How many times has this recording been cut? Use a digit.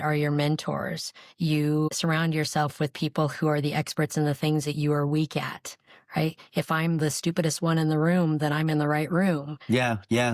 1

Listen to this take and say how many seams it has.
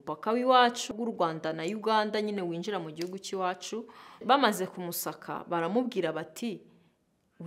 2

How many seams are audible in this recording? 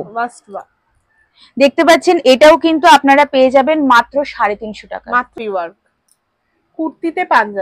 1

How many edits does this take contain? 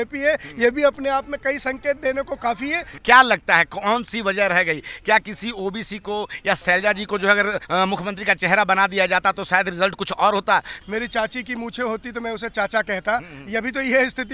4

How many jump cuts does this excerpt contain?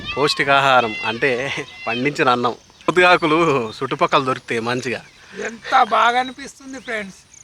1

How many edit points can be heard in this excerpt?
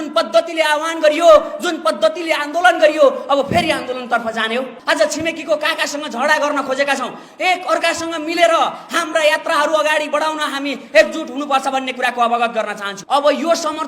2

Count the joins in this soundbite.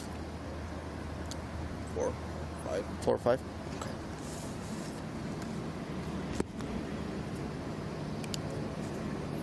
0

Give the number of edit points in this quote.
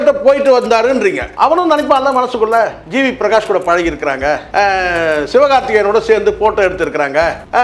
2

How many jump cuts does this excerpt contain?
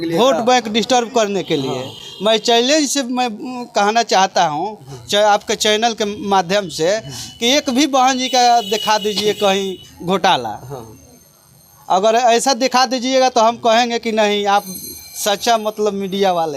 0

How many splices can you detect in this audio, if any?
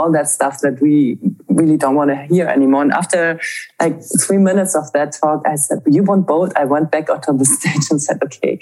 1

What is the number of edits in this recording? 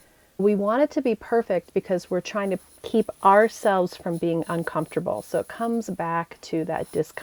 0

